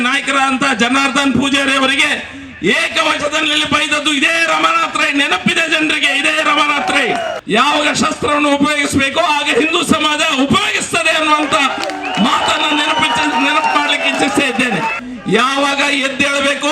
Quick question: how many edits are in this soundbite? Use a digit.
2